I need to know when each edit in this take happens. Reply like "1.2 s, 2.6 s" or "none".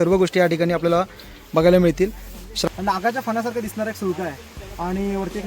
2.4 s